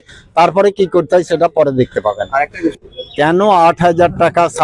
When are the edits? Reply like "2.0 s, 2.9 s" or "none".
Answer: 2.8 s